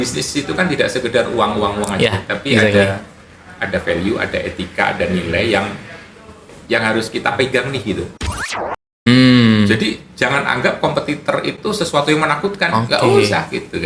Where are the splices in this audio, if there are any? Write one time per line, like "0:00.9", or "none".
0:08.6